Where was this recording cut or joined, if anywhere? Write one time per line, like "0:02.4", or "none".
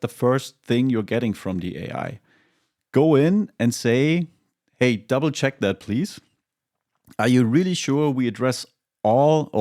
none